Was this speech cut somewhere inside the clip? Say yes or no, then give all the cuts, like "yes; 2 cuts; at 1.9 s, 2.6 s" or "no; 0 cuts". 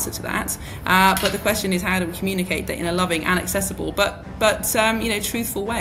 no; 0 cuts